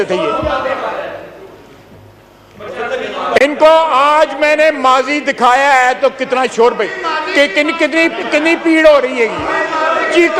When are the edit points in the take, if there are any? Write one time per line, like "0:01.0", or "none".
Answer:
none

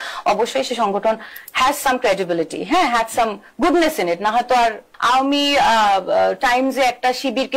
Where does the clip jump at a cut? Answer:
0:04.9

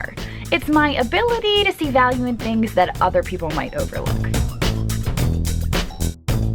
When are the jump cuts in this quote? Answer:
none

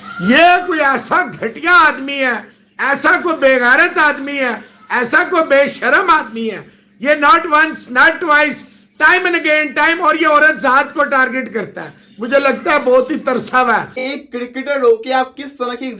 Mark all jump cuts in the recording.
0:14.0

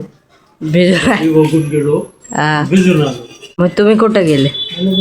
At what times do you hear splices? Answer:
0:03.6

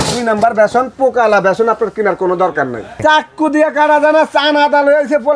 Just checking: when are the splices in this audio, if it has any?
0:03.0

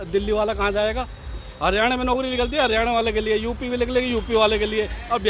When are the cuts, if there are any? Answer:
none

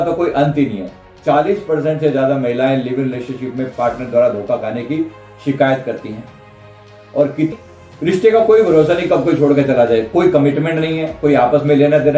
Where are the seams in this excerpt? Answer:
0:07.5

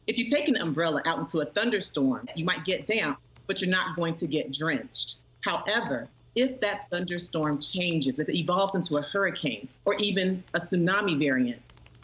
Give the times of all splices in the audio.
0:02.3

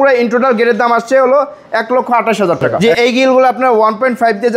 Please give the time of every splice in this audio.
0:02.7

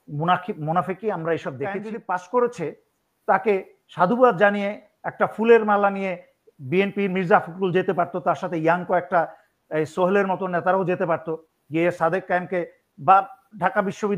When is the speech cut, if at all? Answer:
0:01.9

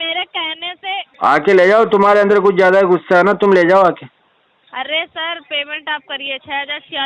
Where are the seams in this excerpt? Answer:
0:01.1

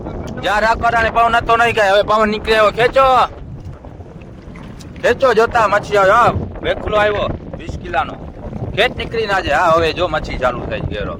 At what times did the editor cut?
none

